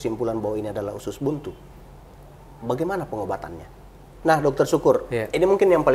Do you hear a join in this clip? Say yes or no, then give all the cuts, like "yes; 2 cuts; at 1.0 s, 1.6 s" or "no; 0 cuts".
yes; 1 cut; at 4.1 s